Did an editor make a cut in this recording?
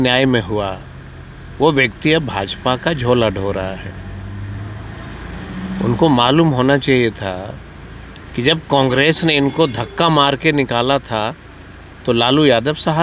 no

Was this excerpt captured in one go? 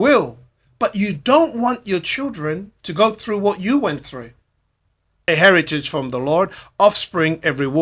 no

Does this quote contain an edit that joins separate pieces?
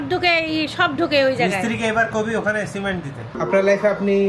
yes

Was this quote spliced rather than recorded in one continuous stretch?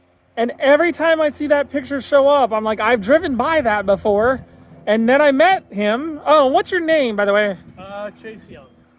no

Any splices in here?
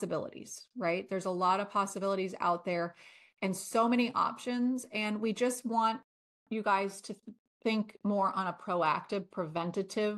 no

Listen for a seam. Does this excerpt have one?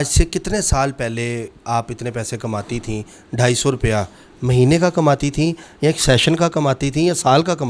no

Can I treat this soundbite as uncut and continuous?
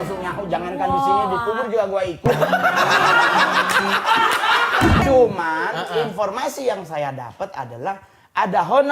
no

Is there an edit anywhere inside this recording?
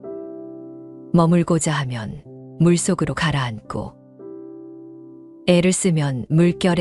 no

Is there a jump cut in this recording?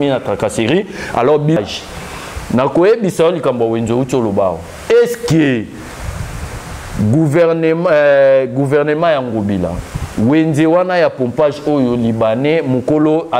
yes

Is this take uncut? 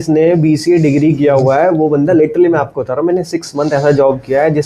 yes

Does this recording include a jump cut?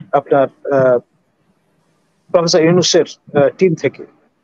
no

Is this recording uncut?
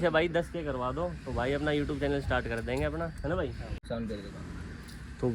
no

